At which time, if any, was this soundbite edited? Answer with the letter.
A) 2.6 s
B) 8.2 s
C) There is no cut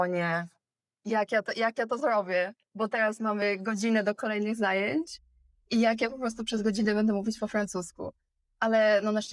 C